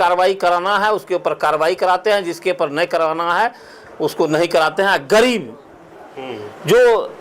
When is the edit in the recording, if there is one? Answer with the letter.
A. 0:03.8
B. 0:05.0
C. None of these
C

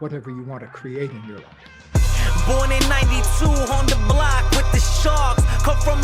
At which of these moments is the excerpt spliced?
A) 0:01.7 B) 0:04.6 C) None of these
A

